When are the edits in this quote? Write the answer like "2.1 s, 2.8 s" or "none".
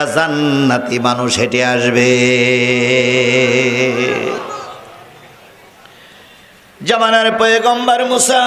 none